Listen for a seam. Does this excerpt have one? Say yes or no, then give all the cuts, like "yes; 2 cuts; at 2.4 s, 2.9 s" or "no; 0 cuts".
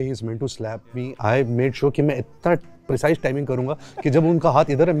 no; 0 cuts